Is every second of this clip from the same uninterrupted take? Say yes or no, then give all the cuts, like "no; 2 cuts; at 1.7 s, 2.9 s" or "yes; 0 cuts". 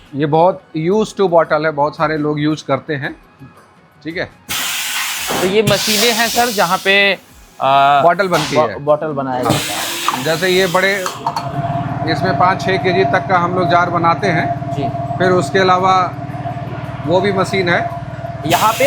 yes; 0 cuts